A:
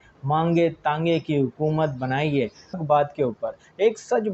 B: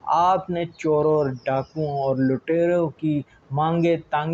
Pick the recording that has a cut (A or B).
A